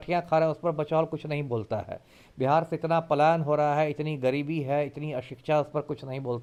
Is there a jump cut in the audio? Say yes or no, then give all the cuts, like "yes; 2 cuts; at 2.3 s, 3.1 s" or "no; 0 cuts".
no; 0 cuts